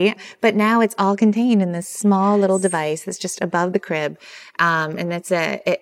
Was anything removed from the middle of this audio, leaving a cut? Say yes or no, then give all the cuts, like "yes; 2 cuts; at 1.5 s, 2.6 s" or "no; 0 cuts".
no; 0 cuts